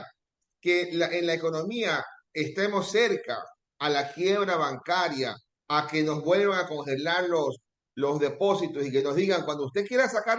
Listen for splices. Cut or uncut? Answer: uncut